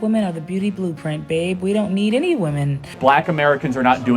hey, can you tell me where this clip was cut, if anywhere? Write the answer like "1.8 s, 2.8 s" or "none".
3.0 s